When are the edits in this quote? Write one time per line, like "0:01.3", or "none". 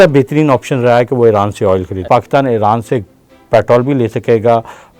0:02.0